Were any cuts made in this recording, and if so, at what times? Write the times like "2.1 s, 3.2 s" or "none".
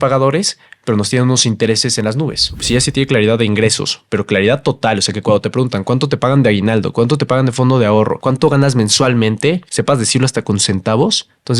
2.6 s